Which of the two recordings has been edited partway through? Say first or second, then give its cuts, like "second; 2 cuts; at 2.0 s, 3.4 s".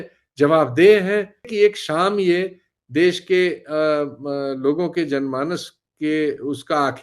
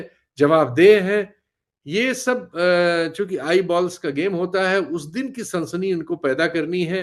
first; 1 cut; at 1.4 s